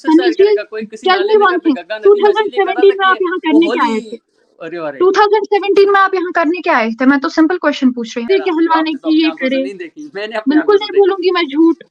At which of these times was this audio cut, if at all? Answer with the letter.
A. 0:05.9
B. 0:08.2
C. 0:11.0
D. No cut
B